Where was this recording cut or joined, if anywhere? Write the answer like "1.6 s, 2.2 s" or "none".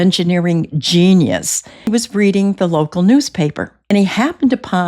1.9 s, 3.9 s